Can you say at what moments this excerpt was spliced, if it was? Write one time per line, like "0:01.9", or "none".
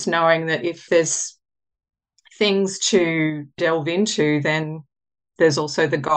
0:00.8
0:03.6
0:05.3